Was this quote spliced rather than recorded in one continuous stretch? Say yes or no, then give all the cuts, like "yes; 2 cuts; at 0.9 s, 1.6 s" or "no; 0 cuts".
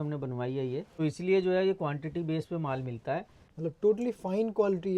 yes; 2 cuts; at 0.9 s, 3.4 s